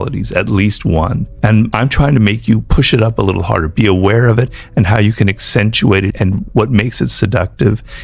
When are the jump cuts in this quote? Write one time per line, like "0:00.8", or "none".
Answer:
0:01.6
0:02.7
0:06.5